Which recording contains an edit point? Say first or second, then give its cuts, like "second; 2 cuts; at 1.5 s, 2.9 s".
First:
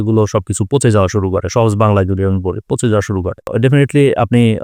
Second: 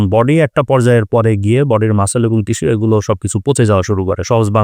first; 1 cut; at 3.5 s